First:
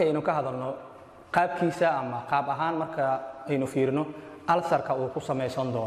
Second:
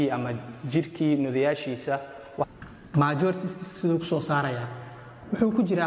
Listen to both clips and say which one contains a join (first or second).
second